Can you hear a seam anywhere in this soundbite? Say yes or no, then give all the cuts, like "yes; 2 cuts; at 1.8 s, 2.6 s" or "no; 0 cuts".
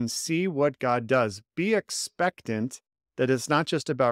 no; 0 cuts